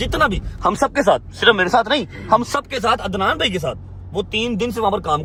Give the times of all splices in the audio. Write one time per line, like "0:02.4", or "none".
none